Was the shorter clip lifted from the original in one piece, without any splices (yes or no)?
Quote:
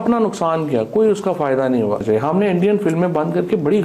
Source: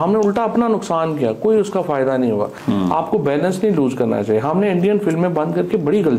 no